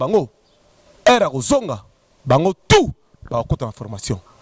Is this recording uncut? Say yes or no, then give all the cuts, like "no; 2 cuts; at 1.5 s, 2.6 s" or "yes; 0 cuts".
yes; 0 cuts